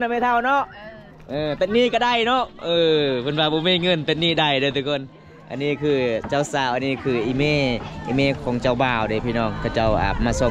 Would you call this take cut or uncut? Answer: uncut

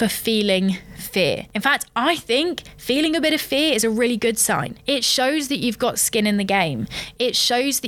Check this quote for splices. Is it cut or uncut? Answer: uncut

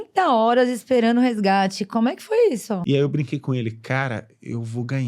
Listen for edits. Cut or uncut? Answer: cut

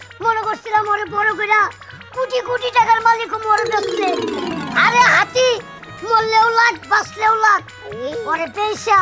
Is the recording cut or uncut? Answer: uncut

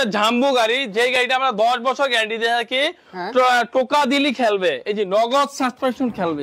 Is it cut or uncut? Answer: uncut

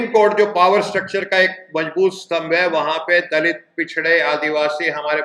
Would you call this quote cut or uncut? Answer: uncut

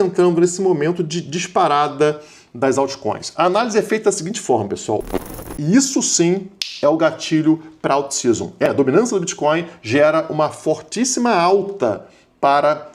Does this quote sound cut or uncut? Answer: cut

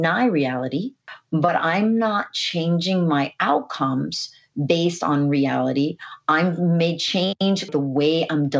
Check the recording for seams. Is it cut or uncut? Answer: cut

